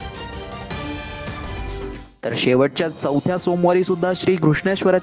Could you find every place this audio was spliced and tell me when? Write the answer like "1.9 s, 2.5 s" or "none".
1.9 s